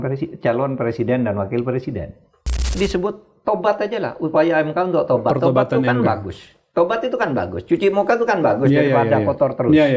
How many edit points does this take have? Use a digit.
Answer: 1